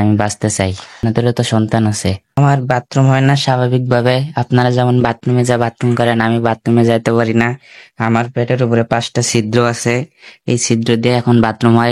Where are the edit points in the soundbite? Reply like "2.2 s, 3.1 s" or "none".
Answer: 1.0 s, 2.4 s